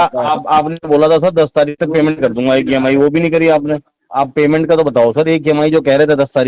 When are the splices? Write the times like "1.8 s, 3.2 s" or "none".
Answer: 4.0 s